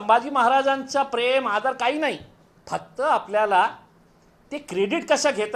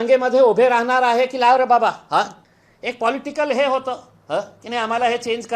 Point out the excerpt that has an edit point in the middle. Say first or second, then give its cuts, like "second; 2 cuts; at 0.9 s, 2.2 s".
second; 1 cut; at 2.4 s